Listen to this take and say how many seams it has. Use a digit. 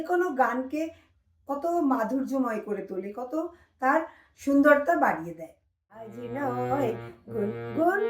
1